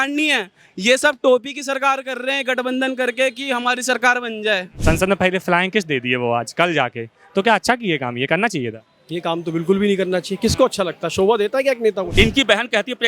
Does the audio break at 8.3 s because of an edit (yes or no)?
no